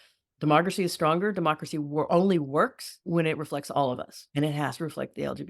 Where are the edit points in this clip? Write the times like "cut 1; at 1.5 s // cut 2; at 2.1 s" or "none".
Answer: cut 1; at 2.9 s // cut 2; at 4.2 s